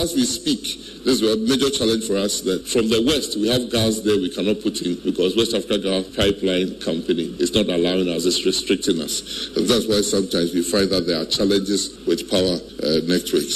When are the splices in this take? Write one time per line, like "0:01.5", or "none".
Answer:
0:02.6
0:05.0
0:06.1
0:07.3
0:12.3